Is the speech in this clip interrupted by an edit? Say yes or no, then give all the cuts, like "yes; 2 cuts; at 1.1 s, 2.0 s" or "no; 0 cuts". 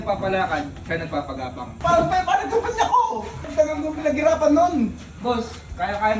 yes; 2 cuts; at 1.7 s, 3.5 s